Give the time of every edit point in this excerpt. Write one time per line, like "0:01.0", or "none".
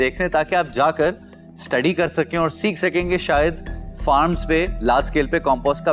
none